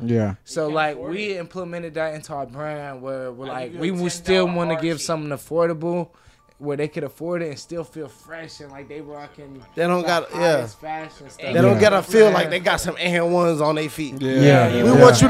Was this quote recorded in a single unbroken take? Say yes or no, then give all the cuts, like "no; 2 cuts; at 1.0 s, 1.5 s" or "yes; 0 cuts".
yes; 0 cuts